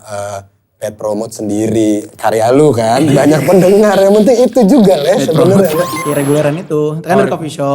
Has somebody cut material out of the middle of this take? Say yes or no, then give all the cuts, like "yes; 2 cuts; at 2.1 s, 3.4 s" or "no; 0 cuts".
yes; 1 cut; at 6.0 s